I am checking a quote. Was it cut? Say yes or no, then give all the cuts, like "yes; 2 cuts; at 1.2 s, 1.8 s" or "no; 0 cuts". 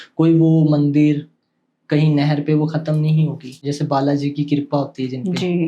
yes; 1 cut; at 3.6 s